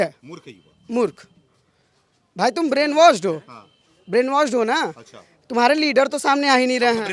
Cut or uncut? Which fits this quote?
uncut